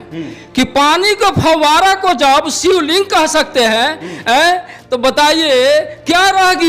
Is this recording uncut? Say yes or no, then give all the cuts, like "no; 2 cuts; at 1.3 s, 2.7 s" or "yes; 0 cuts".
yes; 0 cuts